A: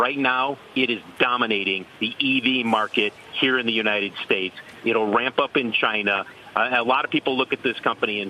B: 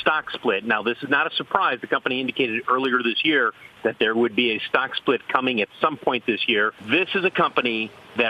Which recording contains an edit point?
B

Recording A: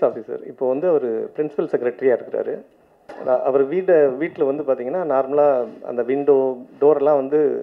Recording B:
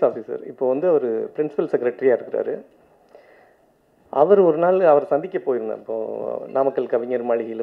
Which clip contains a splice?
A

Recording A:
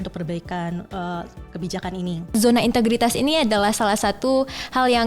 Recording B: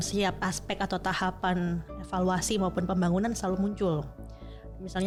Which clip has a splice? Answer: A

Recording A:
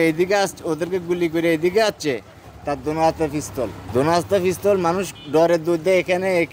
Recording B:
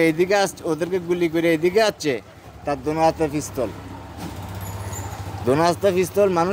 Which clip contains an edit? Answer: A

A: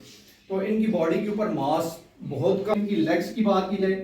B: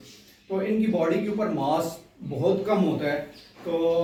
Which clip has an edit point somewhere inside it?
A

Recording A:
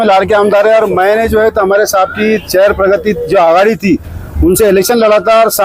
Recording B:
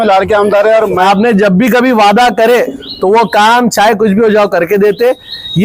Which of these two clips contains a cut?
B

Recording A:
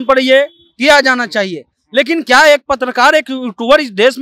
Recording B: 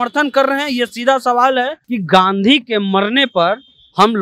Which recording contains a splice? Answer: B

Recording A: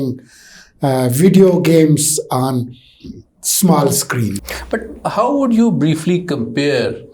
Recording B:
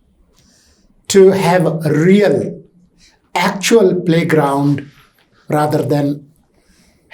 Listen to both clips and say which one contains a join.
A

